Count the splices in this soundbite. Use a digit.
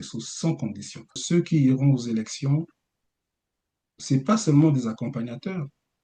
1